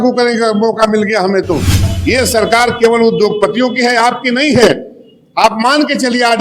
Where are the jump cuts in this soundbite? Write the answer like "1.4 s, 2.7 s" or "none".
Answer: 1.9 s